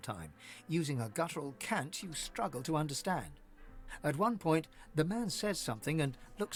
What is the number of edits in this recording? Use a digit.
0